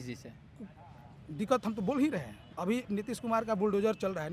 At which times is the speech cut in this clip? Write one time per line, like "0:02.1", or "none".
0:02.5